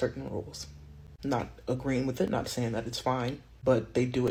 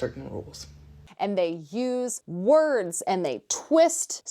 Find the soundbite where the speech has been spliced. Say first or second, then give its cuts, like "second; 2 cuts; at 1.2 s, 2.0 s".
second; 1 cut; at 1.2 s